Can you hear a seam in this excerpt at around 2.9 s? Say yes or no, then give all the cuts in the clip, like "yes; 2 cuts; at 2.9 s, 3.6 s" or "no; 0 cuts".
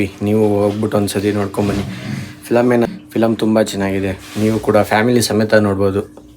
yes; 1 cut; at 2.9 s